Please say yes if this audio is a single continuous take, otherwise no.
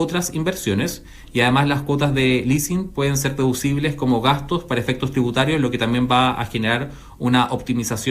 yes